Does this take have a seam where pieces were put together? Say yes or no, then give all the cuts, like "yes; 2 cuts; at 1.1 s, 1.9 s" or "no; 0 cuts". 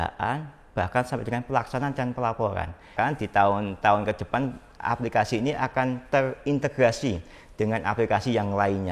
yes; 1 cut; at 2.9 s